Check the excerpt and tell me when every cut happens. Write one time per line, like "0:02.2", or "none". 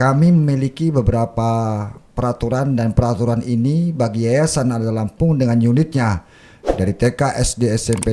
none